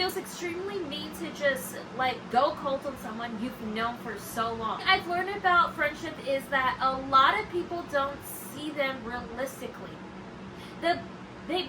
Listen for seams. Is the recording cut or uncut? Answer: cut